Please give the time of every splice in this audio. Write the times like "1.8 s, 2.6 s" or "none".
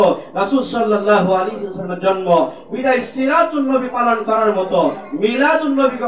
none